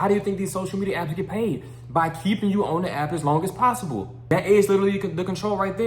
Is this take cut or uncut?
cut